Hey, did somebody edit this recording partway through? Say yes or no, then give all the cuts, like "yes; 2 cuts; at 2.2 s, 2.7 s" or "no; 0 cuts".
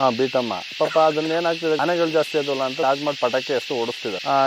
yes; 2 cuts; at 1.8 s, 2.8 s